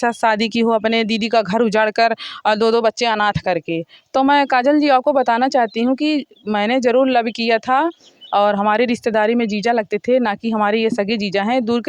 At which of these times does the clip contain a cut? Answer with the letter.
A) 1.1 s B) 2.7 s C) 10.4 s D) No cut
D